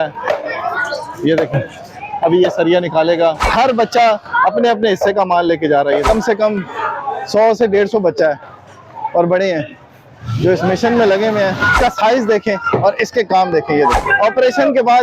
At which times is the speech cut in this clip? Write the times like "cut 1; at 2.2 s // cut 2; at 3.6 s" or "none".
cut 1; at 3.4 s // cut 2; at 6.1 s // cut 3; at 11.8 s // cut 4; at 14.0 s